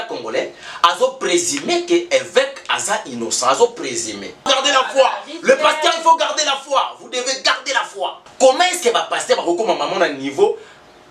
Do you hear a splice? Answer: yes; 2 cuts; at 4.5 s, 8.2 s

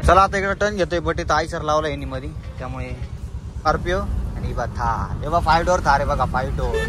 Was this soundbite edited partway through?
yes; 1 cut; at 3.7 s

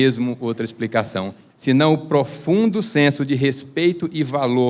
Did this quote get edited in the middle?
yes; 1 cut; at 1.4 s

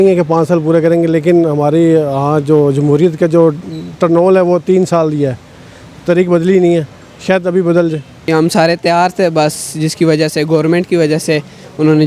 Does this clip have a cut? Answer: no; 0 cuts

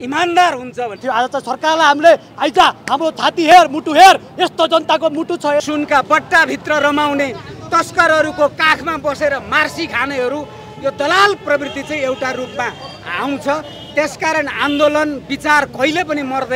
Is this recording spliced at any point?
yes; 2 cuts; at 1.0 s, 5.6 s

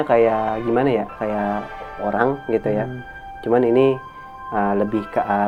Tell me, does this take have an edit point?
no; 0 cuts

